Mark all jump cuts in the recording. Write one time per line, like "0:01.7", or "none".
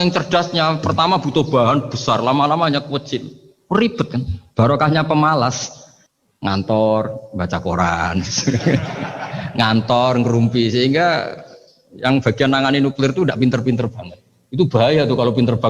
none